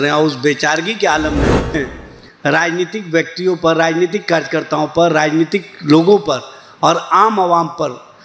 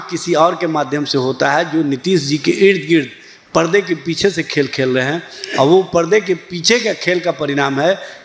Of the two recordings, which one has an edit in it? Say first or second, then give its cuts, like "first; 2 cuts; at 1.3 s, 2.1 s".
first; 1 cut; at 1.7 s